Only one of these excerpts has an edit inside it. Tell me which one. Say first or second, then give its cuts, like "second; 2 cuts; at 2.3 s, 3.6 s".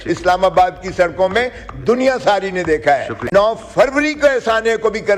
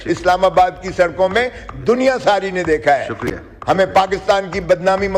first; 1 cut; at 3.2 s